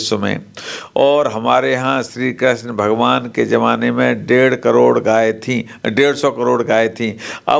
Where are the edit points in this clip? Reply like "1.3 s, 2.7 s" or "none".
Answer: none